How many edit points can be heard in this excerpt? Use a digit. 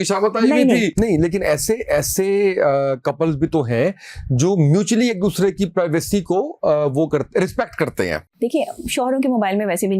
2